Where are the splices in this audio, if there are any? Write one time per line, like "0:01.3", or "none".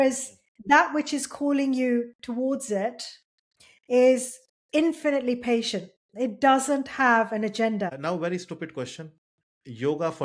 0:08.0

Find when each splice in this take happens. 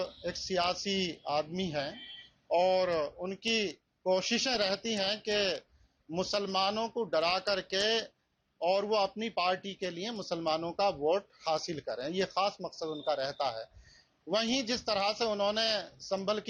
none

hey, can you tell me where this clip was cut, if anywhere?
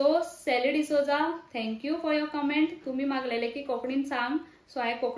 none

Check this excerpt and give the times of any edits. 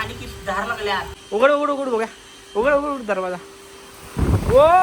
0:01.1

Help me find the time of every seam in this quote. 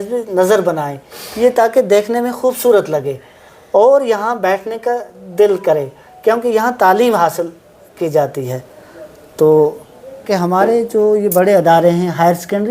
0:10.2

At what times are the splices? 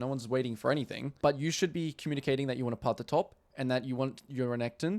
0:01.0

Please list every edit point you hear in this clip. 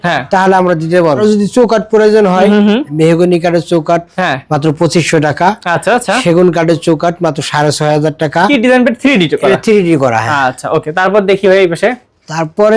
0:01.2
0:08.5

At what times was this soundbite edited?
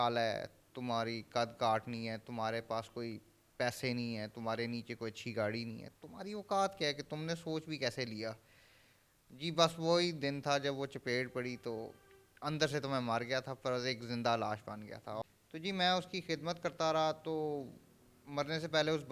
0:15.2

